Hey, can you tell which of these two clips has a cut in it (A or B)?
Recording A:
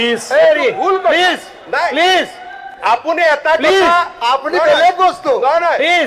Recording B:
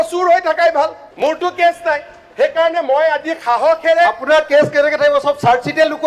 B